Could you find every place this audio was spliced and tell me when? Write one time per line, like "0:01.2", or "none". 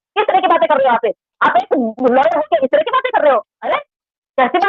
0:03.7